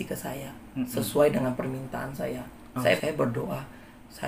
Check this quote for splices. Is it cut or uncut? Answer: cut